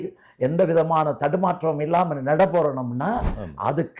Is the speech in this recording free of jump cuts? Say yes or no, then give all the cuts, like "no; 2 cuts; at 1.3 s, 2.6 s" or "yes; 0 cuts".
yes; 0 cuts